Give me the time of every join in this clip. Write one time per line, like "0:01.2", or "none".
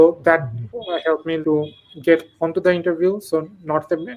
0:01.4